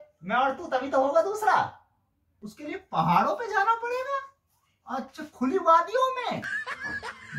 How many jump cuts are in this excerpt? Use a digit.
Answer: 1